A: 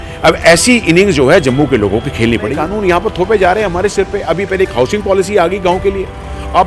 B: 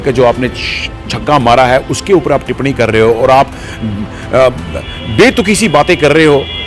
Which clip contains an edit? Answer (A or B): A